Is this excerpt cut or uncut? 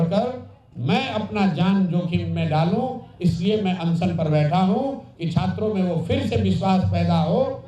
uncut